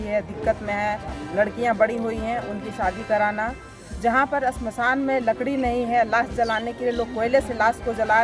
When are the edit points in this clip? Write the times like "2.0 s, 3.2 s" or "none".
none